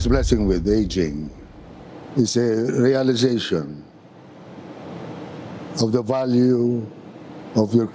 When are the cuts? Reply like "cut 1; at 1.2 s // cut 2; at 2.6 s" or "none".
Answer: none